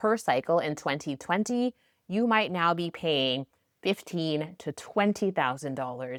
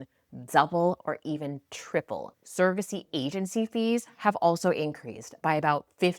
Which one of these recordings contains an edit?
second; 1 cut; at 2.4 s

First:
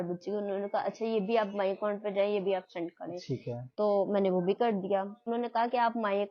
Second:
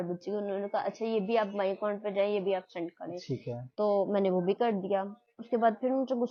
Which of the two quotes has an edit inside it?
first; 1 cut; at 5.2 s

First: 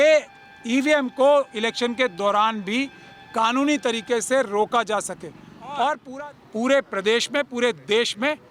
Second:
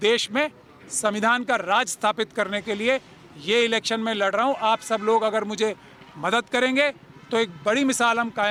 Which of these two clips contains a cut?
first; 1 cut; at 6.0 s

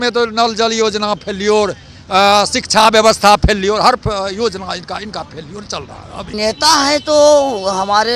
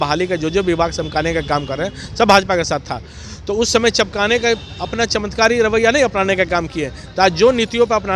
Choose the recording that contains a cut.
first; 1 cut; at 6.2 s

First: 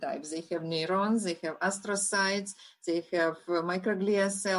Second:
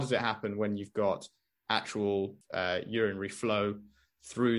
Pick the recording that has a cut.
second; 1 cut; at 2.4 s

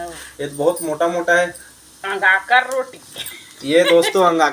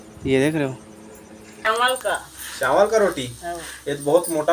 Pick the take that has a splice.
second; 1 cut; at 1.7 s

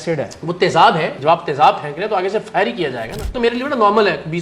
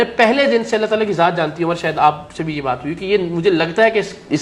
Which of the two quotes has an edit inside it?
first; 2 cuts; at 1.2 s, 3.3 s

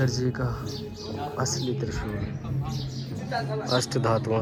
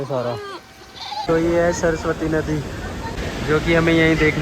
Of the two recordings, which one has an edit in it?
second; 2 cuts; at 1.3 s, 3.2 s

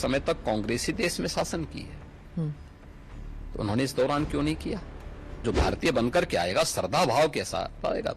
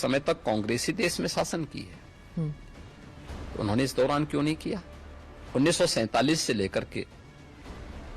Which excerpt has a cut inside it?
first; 1 cut; at 5.4 s

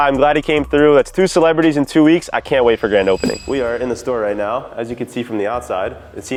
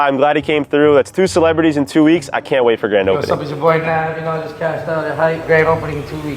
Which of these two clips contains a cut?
second; 2 cuts; at 3.2 s, 5.4 s

